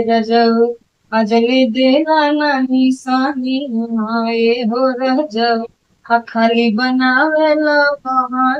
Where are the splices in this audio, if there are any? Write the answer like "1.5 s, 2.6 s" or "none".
none